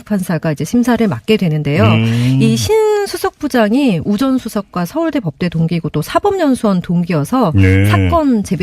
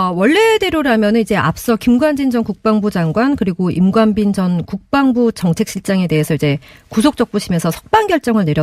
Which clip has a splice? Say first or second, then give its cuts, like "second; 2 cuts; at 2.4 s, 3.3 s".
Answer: first; 1 cut; at 2.5 s